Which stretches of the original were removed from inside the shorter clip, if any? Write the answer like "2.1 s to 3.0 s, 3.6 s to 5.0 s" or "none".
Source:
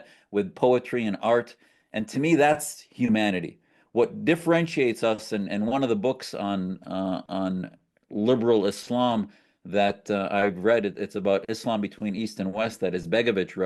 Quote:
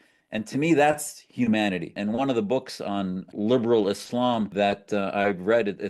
3.6 s to 5.5 s, 6.8 s to 8.0 s, 9.3 s to 9.7 s